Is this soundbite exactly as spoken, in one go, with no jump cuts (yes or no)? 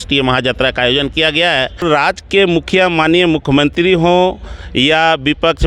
no